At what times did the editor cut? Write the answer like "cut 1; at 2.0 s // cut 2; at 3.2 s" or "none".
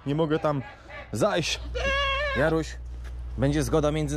cut 1; at 1.6 s